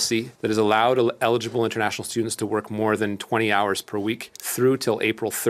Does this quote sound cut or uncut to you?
uncut